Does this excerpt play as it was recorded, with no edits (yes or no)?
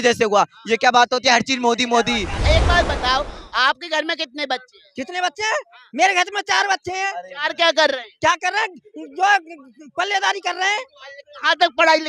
no